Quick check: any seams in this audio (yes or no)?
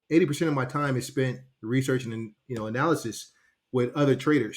yes